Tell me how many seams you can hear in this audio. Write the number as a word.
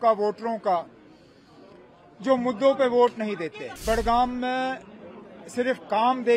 one